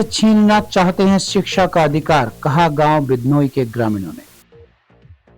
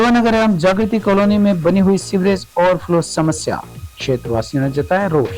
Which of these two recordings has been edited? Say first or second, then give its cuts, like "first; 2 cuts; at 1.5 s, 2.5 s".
first; 1 cut; at 4.4 s